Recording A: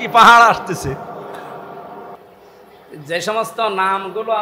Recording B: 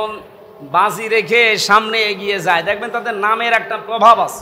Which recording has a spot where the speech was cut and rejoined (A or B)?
A